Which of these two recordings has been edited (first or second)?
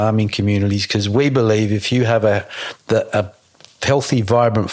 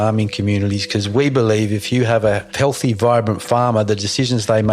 second